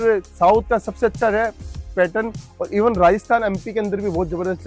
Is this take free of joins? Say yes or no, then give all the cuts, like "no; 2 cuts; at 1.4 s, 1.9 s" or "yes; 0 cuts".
yes; 0 cuts